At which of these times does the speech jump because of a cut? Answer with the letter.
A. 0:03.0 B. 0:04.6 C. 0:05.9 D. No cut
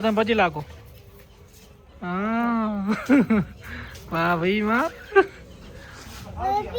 D